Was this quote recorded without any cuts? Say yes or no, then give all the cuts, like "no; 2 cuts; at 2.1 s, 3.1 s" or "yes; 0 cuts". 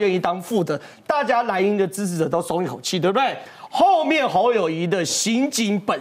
no; 1 cut; at 3.5 s